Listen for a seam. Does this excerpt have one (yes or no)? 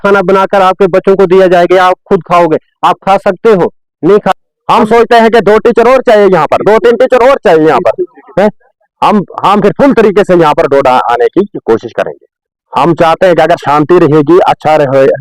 yes